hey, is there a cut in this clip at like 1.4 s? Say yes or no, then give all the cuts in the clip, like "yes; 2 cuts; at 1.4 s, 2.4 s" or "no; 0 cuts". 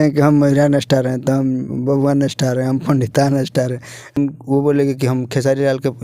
no; 1 cut; at 4.2 s